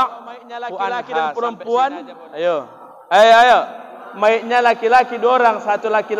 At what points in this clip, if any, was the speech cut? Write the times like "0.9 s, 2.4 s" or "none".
1.4 s